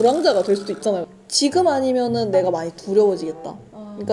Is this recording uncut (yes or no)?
no